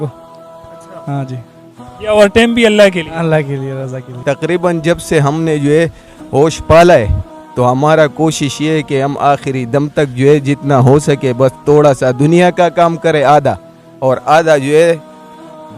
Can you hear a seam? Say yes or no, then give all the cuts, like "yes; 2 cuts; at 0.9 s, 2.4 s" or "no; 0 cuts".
yes; 1 cut; at 4.2 s